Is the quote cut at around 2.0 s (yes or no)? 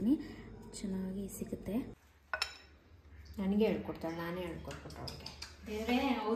yes